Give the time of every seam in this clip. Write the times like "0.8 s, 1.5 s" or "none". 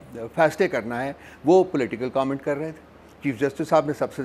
none